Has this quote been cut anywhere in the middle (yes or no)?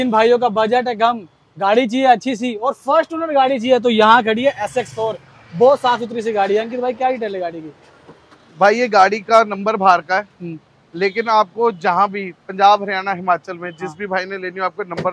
no